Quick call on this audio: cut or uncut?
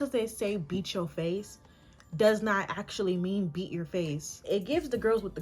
cut